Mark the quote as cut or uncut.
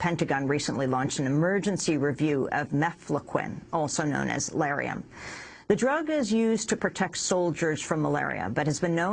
uncut